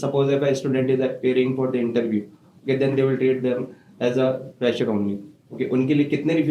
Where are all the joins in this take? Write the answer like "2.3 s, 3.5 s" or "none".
none